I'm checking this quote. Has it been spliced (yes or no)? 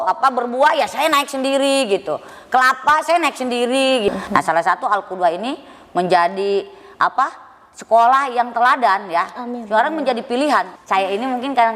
yes